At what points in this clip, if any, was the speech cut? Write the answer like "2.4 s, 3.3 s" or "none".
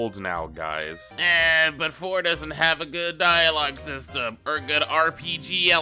1.0 s